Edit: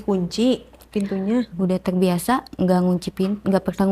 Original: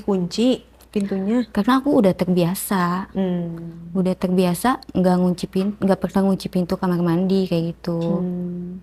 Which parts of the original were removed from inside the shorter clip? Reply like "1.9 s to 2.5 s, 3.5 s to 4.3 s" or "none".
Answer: 1.5 s to 3.8 s